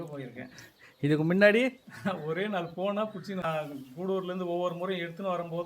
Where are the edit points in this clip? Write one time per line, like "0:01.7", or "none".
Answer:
0:03.4